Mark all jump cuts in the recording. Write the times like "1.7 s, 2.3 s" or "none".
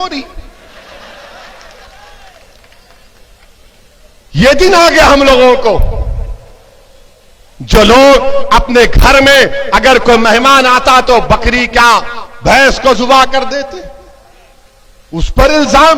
none